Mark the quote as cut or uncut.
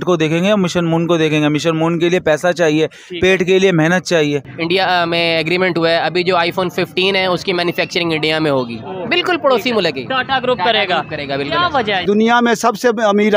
cut